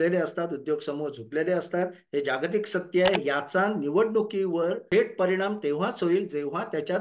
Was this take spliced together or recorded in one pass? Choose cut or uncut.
cut